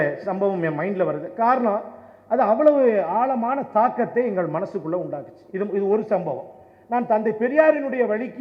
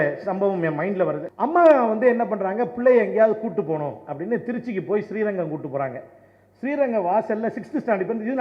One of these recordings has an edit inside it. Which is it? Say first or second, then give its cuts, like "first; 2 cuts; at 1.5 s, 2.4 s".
second; 1 cut; at 1.2 s